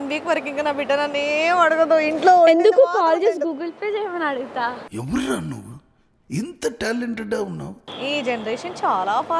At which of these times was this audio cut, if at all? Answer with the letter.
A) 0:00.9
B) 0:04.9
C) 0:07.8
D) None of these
C